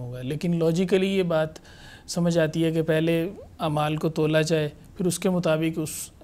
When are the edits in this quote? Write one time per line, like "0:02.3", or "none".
none

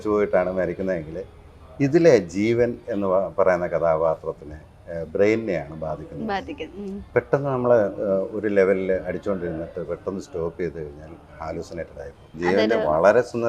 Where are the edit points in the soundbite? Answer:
0:12.2

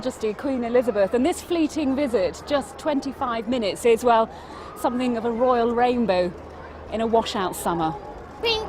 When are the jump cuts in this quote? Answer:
0:01.1

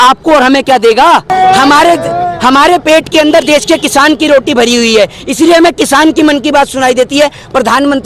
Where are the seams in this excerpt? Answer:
0:01.3

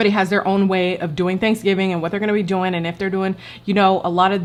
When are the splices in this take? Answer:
none

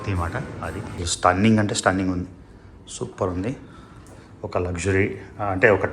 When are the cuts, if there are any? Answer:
0:01.0

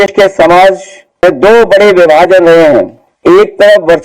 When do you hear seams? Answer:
0:01.2
0:03.0

